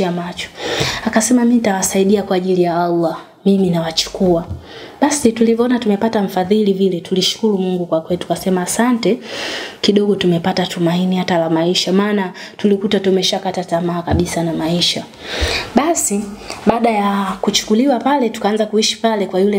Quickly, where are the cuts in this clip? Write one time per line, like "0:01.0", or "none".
none